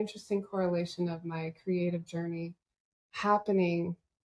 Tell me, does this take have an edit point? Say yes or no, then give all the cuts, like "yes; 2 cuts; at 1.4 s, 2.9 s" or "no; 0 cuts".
no; 0 cuts